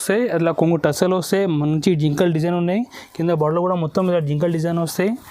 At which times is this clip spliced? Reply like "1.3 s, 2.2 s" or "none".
none